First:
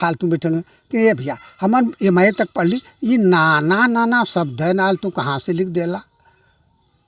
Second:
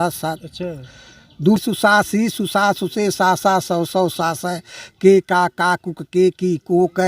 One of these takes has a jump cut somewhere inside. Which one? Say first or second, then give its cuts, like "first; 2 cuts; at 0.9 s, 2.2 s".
second; 1 cut; at 1.6 s